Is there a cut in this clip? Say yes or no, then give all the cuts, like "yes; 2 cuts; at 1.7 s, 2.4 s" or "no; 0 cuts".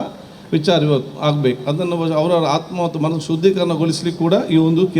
no; 0 cuts